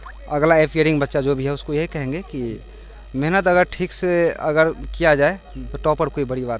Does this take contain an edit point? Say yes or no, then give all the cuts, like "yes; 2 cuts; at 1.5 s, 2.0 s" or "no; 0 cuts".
no; 0 cuts